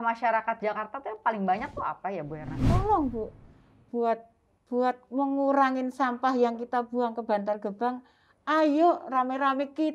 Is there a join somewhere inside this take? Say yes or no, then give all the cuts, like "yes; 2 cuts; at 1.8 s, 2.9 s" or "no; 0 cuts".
yes; 1 cut; at 2.6 s